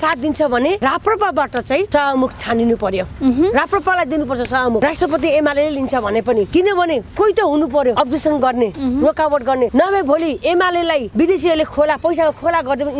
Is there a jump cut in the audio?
yes; 7 cuts; at 0.8 s, 1.9 s, 4.8 s, 6.5 s, 7.9 s, 9.7 s, 11.1 s

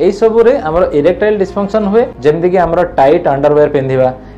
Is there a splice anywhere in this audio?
yes; 1 cut; at 2.1 s

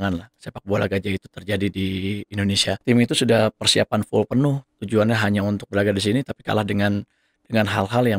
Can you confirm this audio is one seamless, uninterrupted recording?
no; 1 cut; at 2.7 s

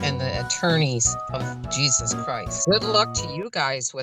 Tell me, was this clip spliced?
yes; 1 cut; at 2.5 s

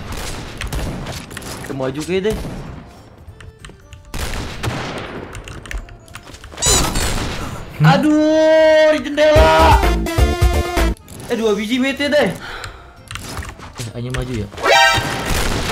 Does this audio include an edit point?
yes; 1 cut; at 3.5 s

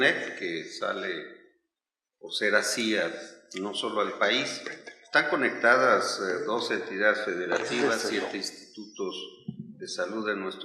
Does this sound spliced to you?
yes; 1 cut; at 9.0 s

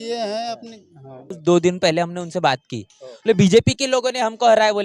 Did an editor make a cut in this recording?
yes; 1 cut; at 1.3 s

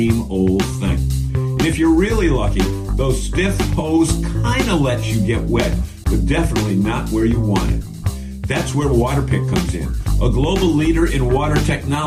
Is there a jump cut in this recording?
no; 0 cuts

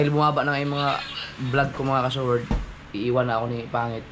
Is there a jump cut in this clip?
yes; 1 cut; at 2.5 s

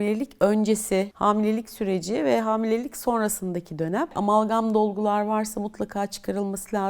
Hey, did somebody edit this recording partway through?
yes; 2 cuts; at 1.1 s, 4.2 s

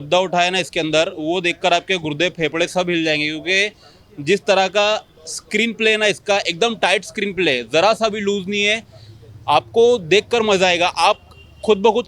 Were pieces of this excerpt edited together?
no; 0 cuts

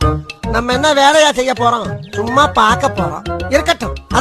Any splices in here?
no; 0 cuts

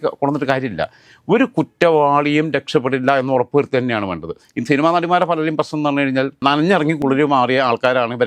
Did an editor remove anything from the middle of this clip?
no; 0 cuts

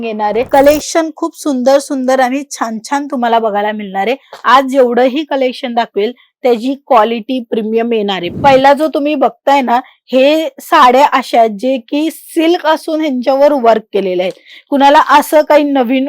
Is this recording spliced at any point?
yes; 1 cut; at 8.3 s

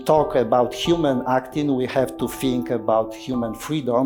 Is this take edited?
no; 0 cuts

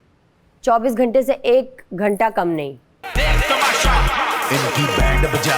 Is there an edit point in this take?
yes; 1 cut; at 3.0 s

